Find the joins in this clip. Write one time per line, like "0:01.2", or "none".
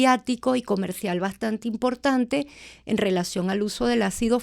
none